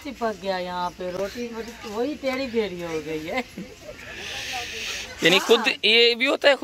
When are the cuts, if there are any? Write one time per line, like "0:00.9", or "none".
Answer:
none